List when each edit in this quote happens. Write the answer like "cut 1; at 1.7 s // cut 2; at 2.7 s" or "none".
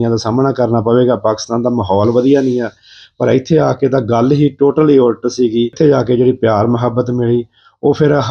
cut 1; at 5.7 s